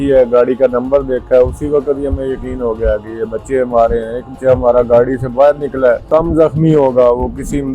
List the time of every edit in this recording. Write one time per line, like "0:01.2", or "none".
0:04.3
0:06.0